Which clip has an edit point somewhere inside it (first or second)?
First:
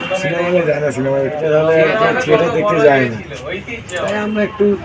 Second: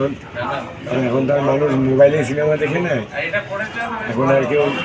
first